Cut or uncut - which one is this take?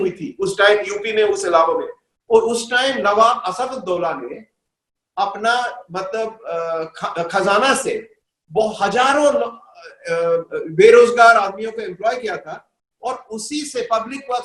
uncut